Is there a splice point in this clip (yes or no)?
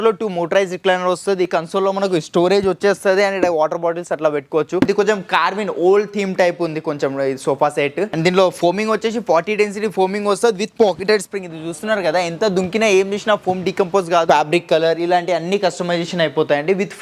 yes